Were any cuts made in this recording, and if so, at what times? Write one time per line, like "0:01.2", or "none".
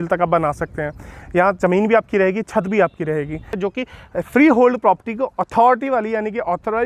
0:03.5